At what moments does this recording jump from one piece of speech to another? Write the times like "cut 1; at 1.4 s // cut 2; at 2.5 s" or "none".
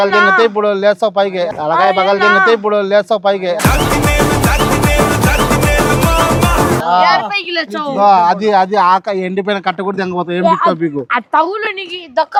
none